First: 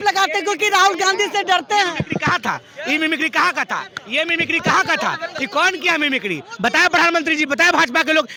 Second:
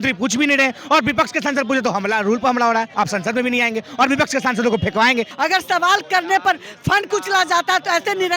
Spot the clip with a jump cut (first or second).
second